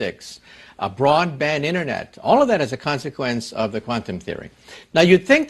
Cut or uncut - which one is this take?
cut